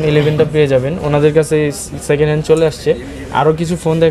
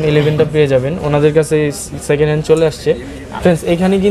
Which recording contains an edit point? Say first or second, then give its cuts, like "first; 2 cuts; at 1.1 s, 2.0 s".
second; 1 cut; at 3.2 s